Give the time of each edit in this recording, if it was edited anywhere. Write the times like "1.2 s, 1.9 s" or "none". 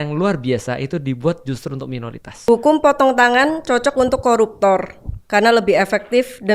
2.3 s